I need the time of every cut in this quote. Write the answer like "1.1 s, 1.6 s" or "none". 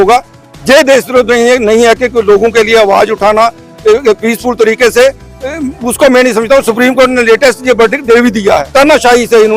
8.7 s